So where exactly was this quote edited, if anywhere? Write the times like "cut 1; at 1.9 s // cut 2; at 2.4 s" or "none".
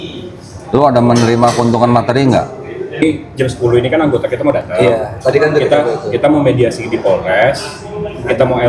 cut 1; at 3.0 s